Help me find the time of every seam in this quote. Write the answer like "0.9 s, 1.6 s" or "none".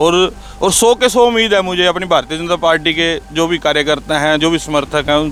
none